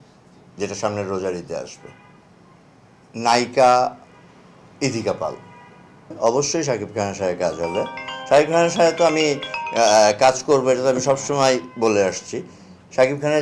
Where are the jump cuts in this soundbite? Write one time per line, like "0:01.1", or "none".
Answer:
0:06.2